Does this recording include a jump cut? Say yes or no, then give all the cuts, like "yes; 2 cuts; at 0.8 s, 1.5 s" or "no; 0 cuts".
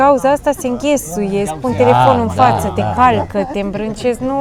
no; 0 cuts